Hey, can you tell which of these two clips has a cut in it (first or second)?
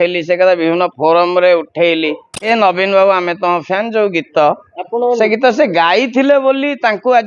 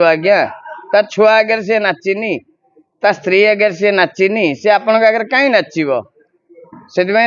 first